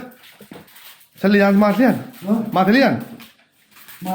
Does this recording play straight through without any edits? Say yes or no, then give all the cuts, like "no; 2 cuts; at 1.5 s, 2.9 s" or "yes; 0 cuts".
yes; 0 cuts